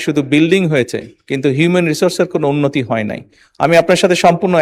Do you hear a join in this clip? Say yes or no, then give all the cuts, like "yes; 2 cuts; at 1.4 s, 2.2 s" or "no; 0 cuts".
no; 0 cuts